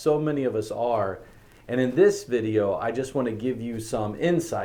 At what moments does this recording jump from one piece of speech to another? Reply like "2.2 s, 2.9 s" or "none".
none